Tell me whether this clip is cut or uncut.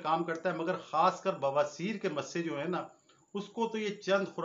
uncut